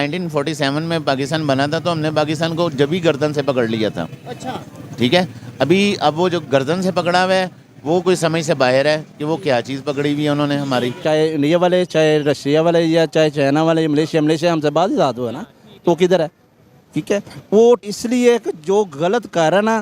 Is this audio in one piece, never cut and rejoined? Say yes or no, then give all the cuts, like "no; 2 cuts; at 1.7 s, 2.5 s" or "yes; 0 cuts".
no; 2 cuts; at 11.0 s, 17.8 s